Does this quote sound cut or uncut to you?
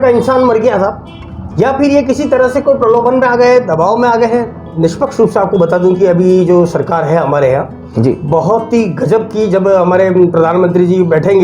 cut